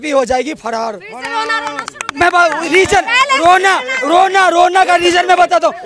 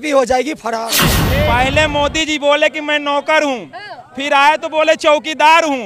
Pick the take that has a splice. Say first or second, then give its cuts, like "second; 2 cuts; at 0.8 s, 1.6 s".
second; 1 cut; at 1.1 s